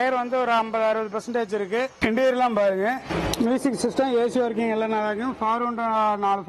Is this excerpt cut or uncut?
uncut